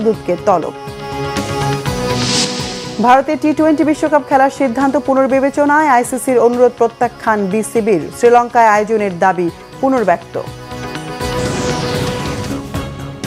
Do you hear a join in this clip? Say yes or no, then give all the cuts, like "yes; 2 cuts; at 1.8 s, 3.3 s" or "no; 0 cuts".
yes; 1 cut; at 12.3 s